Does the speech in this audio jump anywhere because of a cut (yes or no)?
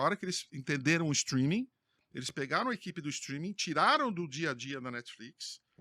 no